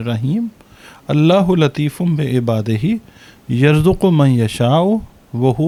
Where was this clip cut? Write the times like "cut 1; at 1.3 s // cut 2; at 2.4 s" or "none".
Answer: none